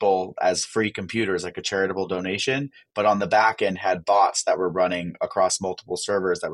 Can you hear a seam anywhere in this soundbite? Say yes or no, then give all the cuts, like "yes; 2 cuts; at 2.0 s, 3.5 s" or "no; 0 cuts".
no; 0 cuts